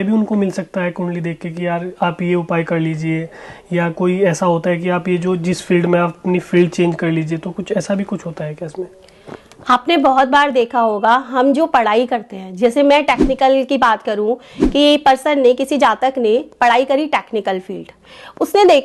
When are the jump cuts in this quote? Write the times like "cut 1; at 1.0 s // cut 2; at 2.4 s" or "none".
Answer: none